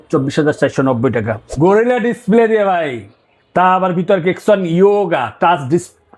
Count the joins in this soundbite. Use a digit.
1